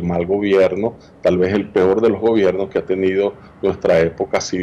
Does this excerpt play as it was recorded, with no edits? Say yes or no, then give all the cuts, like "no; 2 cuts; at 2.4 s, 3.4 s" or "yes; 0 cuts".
yes; 0 cuts